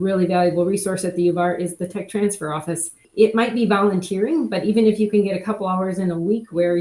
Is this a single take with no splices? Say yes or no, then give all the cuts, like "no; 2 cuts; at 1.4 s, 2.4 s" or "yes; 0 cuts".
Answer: no; 1 cut; at 3.0 s